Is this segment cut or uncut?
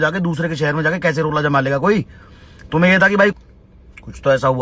cut